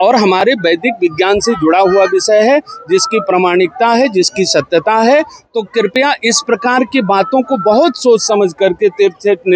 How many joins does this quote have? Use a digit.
0